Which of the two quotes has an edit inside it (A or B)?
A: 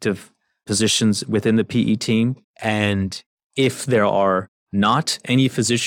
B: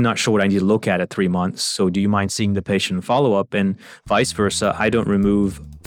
A